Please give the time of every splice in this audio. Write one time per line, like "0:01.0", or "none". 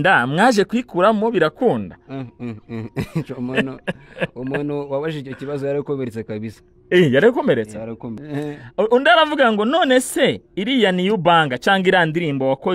0:08.2